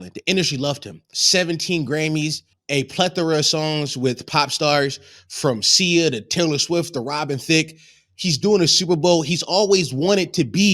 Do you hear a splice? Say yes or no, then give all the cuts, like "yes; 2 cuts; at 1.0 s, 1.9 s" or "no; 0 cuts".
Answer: yes; 2 cuts; at 1.1 s, 2.5 s